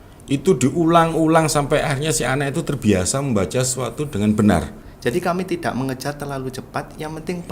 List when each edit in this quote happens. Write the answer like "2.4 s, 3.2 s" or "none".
4.8 s